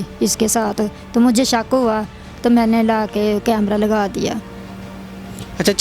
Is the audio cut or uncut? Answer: uncut